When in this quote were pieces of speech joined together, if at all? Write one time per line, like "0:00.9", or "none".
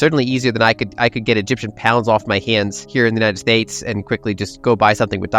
0:02.8
0:04.5